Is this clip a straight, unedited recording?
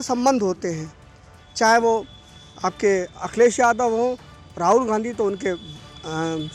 yes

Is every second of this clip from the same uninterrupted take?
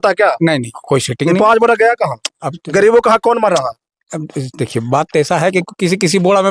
yes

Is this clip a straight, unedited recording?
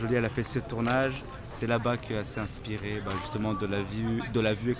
yes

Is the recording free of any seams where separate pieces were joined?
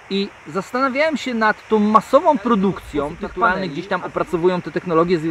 no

